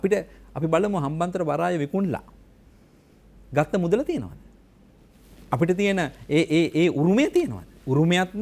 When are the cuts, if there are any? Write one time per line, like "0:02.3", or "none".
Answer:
none